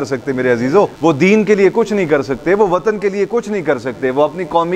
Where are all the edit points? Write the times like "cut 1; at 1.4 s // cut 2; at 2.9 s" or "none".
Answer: none

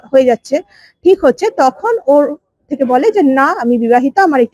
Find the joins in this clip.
none

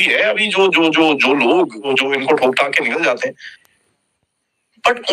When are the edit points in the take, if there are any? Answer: cut 1; at 1.9 s // cut 2; at 3.5 s

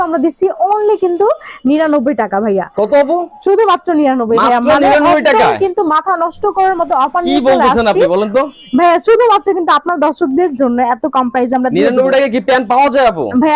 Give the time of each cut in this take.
none

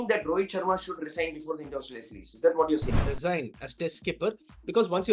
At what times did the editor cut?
cut 1; at 2.9 s

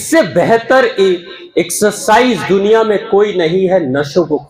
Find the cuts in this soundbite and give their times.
none

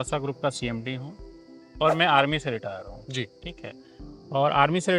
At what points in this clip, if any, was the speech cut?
none

